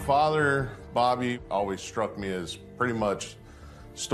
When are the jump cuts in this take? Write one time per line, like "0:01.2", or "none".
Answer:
0:01.3